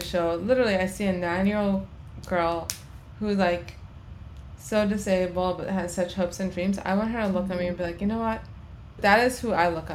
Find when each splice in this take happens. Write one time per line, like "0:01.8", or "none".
0:09.0